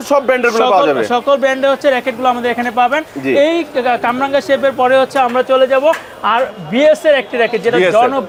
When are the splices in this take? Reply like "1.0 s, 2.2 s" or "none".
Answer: none